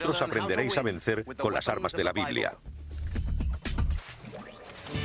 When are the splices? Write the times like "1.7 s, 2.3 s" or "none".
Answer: none